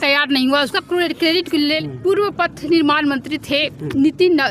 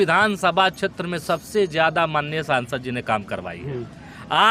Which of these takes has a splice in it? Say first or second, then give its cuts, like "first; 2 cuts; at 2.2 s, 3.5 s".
first; 1 cut; at 1.8 s